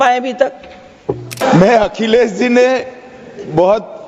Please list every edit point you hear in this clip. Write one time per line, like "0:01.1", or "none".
0:01.4